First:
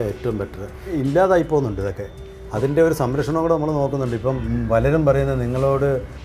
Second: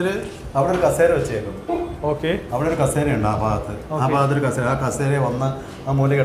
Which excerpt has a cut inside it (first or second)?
first